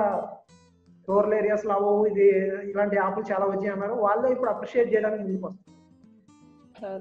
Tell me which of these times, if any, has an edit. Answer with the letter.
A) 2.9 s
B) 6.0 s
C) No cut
C